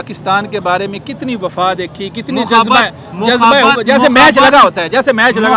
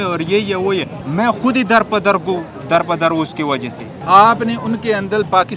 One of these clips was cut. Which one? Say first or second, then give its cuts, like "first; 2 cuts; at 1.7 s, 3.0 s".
second; 2 cuts; at 1.0 s, 3.9 s